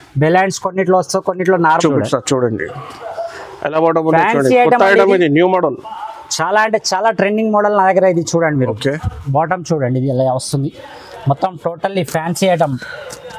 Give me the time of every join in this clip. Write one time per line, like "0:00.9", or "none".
0:01.7